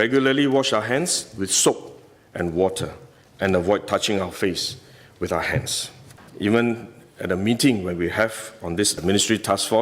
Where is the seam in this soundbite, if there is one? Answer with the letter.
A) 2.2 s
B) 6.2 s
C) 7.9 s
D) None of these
B